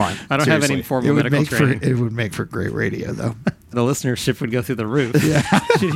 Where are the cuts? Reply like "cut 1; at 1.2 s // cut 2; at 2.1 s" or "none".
cut 1; at 3.7 s